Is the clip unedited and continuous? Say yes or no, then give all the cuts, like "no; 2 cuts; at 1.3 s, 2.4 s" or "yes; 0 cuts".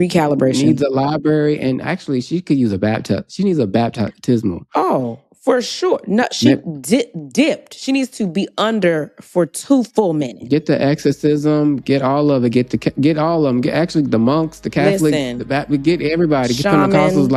yes; 0 cuts